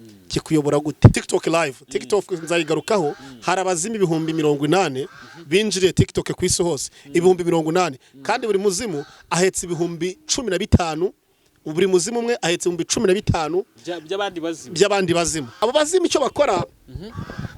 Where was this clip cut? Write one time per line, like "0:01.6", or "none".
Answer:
0:01.2
0:15.4